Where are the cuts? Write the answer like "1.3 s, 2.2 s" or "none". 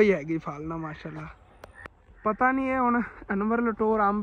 none